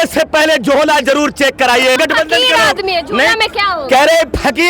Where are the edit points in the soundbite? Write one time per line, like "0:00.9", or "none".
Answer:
0:02.0

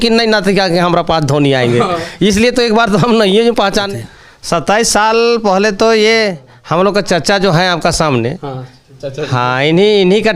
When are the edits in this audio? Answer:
0:03.9

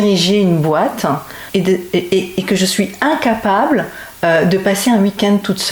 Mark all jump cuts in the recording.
0:01.3

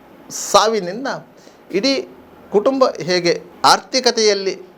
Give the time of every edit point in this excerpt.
0:03.5

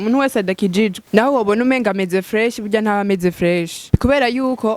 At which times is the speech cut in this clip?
0:01.0
0:03.9

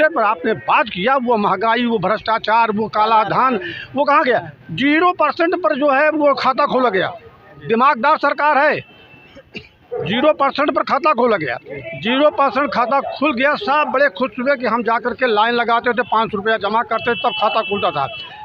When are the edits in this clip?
none

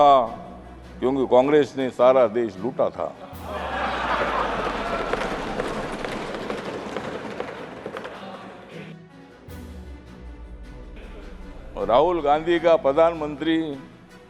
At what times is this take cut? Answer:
0:08.7
0:11.6

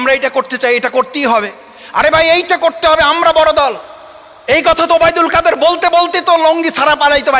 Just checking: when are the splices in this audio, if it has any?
none

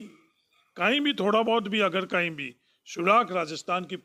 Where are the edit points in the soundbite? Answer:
none

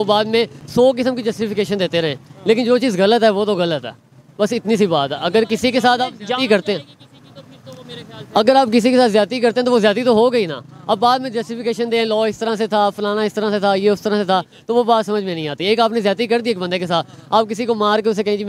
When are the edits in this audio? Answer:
none

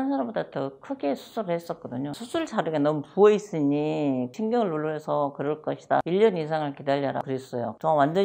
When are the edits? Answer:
none

